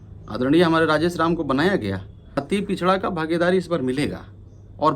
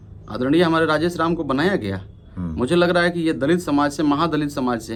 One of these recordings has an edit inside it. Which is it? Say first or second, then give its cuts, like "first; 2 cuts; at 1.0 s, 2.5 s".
first; 1 cut; at 2.4 s